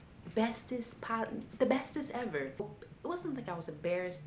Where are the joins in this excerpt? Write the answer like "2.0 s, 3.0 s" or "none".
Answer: 2.8 s